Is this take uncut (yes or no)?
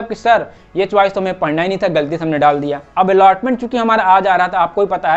yes